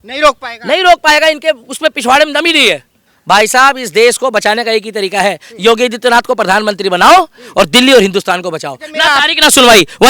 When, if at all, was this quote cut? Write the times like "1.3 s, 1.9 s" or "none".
3.0 s